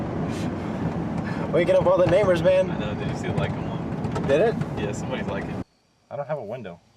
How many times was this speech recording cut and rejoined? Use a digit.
1